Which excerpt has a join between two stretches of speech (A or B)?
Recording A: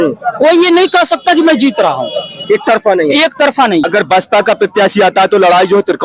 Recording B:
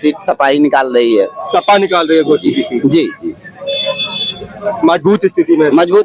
A